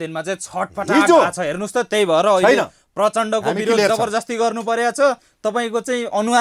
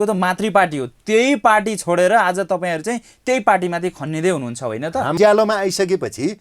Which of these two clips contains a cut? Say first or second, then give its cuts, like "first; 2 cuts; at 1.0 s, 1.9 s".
second; 1 cut; at 5.2 s